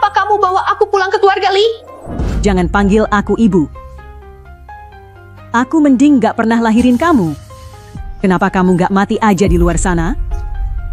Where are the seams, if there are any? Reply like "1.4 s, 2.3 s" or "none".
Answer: none